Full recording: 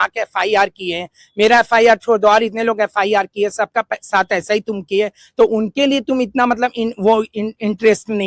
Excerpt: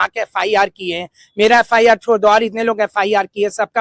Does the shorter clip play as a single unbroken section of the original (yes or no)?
yes